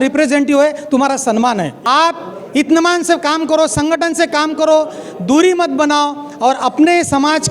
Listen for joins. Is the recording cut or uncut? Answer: cut